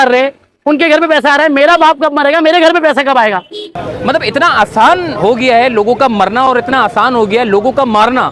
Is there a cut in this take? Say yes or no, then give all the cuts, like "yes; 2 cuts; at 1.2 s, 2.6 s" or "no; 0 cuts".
yes; 1 cut; at 3.7 s